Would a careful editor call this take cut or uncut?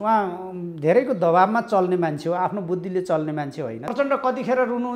cut